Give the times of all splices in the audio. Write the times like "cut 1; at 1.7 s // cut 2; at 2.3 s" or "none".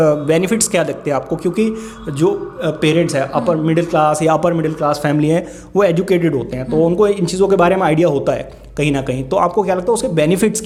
none